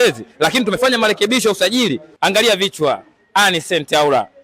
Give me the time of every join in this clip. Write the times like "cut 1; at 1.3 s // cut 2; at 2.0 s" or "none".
cut 1; at 2.1 s

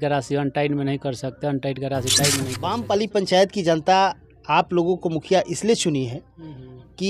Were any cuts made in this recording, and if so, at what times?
cut 1; at 2.6 s

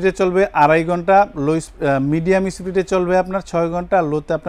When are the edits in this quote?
none

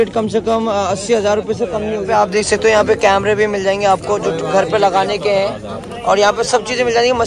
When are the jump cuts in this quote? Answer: none

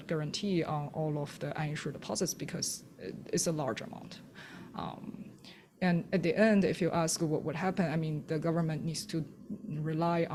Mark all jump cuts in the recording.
none

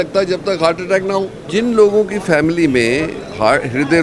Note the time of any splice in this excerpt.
cut 1; at 1.5 s

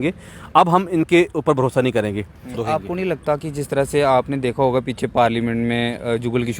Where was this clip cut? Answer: cut 1; at 2.5 s

